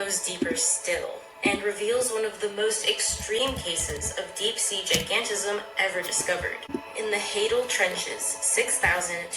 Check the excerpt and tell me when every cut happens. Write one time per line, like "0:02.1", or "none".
0:06.7